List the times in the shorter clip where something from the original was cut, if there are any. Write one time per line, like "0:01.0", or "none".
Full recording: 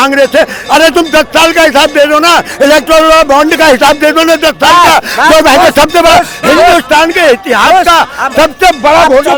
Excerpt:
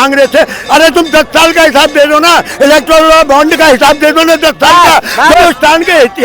0:05.3